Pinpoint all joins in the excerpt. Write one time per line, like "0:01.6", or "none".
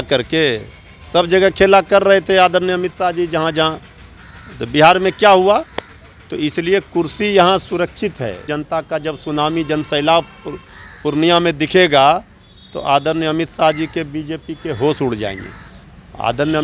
0:08.5